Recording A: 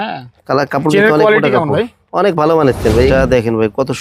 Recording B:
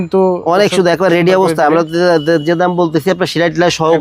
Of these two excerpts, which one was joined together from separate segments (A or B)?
A